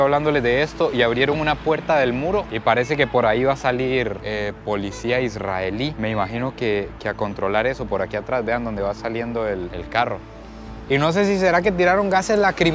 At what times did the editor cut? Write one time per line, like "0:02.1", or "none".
0:10.8